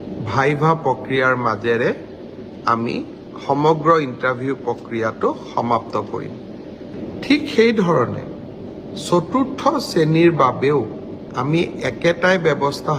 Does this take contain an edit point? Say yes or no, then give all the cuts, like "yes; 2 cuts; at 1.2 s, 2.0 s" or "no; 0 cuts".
yes; 1 cut; at 6.9 s